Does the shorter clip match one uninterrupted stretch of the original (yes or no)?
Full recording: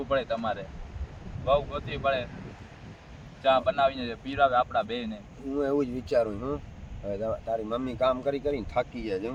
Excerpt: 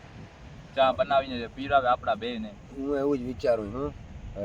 yes